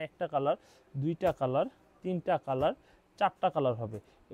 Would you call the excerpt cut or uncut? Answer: uncut